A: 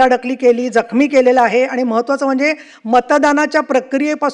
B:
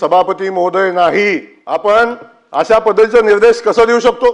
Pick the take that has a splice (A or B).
B